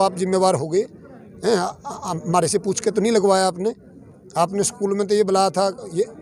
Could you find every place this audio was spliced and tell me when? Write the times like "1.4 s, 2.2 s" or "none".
none